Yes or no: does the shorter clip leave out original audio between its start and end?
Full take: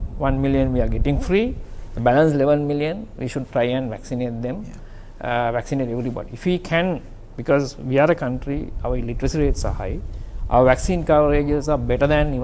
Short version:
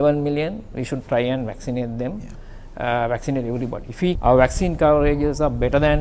yes